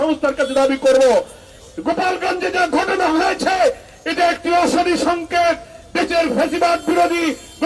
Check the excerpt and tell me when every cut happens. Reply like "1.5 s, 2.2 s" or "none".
none

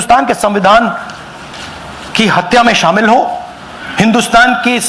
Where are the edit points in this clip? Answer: none

